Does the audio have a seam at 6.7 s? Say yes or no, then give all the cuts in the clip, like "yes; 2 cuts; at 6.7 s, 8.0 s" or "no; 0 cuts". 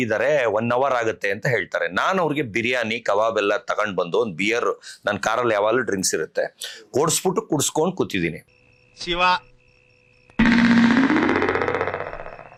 no; 0 cuts